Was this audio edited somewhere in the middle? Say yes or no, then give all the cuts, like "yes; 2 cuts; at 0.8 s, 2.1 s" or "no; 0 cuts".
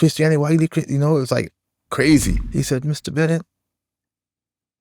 yes; 1 cut; at 2.4 s